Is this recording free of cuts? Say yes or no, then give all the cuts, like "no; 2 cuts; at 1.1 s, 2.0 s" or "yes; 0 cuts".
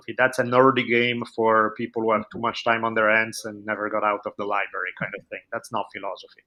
yes; 0 cuts